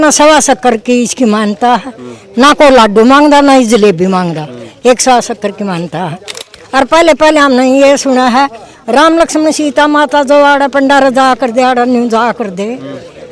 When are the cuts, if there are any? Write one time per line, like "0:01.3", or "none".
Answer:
none